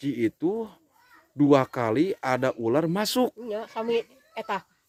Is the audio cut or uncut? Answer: uncut